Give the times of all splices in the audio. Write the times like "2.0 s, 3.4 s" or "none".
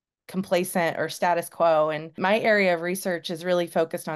2.1 s